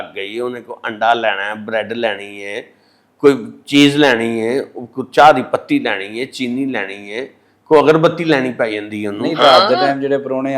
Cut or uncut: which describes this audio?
uncut